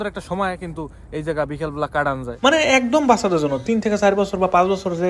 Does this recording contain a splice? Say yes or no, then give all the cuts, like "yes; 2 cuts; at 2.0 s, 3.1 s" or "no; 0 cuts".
yes; 1 cut; at 2.2 s